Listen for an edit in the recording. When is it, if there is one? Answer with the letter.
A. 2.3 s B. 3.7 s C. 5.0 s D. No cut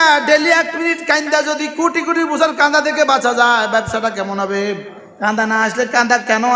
C